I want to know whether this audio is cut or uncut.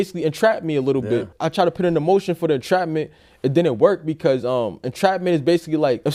uncut